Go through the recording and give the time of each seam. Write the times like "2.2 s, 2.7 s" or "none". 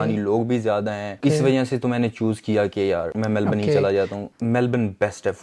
1.2 s, 3.1 s, 4.2 s